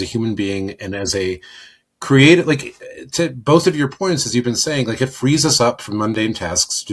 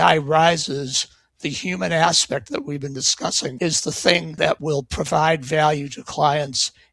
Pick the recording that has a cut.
second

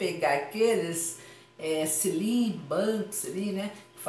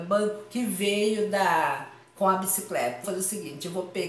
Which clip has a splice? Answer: second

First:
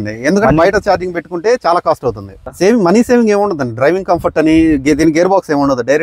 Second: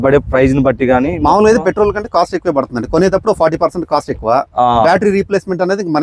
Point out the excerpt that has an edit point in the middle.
first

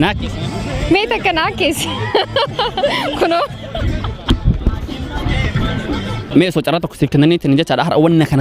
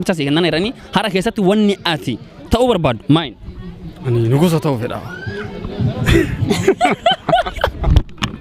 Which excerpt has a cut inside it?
first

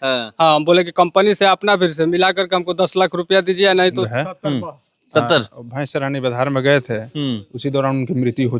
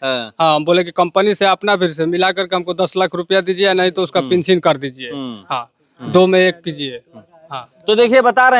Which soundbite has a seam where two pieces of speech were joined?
first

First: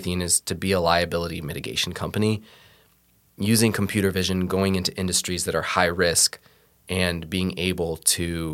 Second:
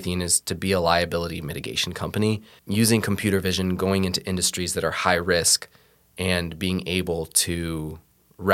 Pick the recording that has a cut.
second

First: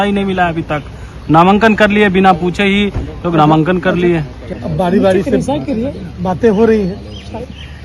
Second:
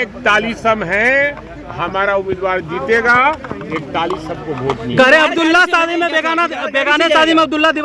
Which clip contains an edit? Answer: first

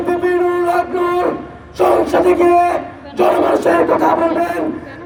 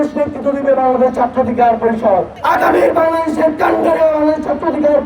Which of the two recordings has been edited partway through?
second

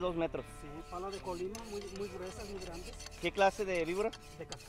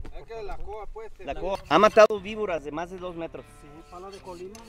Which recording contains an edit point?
second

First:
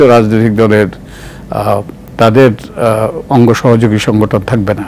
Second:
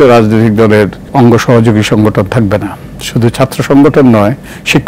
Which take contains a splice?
second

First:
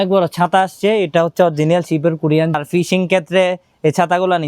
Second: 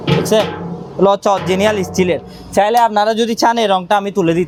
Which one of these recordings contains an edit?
first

